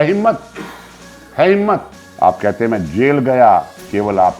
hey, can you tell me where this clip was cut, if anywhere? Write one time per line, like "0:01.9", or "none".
0:02.0

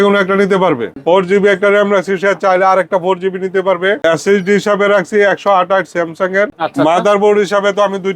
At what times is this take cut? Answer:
0:00.9
0:04.0
0:06.6

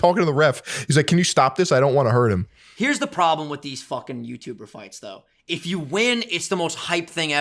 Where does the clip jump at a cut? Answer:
none

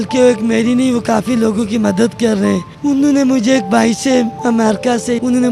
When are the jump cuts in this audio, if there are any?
0:02.7
0:04.6

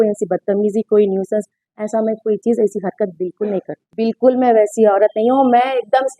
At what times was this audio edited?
0:03.9

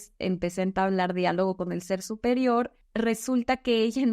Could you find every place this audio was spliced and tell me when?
0:02.8

